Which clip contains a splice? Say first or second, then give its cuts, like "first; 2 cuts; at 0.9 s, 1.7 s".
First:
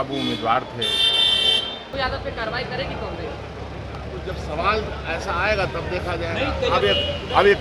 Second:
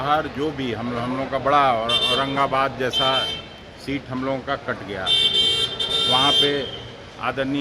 first; 1 cut; at 1.9 s